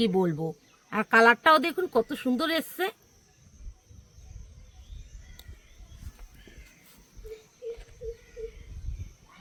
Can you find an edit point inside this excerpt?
no; 0 cuts

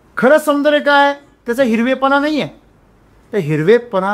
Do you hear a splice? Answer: no; 0 cuts

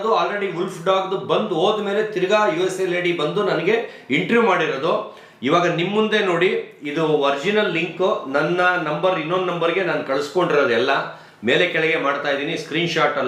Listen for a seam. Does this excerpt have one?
no; 0 cuts

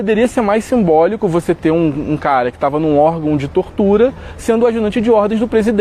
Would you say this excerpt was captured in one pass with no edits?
yes; 0 cuts

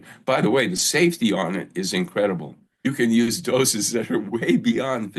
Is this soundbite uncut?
no; 1 cut; at 2.9 s

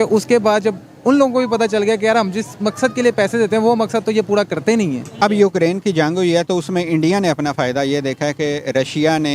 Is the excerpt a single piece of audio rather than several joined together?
no; 1 cut; at 5.1 s

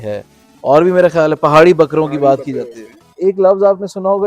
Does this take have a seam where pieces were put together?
yes; 1 cut; at 3.1 s

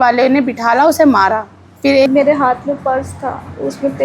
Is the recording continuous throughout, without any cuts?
no; 1 cut; at 2.1 s

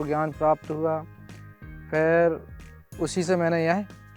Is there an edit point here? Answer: no; 0 cuts

